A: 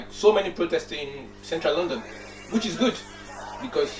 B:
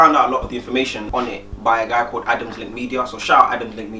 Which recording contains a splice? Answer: B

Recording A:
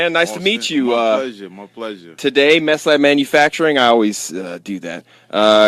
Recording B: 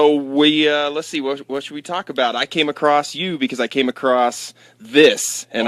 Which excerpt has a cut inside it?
A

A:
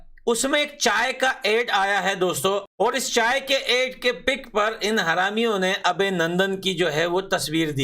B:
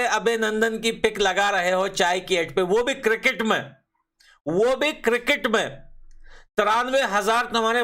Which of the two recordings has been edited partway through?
A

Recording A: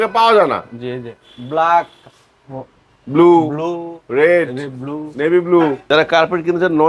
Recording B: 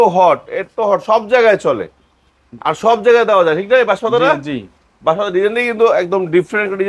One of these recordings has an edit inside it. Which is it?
A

